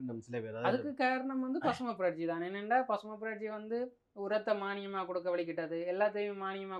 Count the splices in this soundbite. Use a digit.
0